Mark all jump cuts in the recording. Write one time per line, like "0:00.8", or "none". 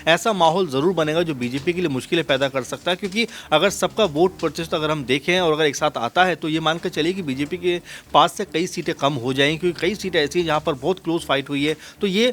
none